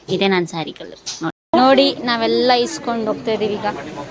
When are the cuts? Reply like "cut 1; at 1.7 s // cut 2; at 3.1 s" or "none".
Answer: cut 1; at 1.4 s